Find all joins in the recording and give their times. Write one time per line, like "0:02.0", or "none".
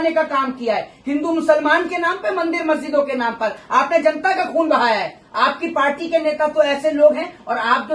none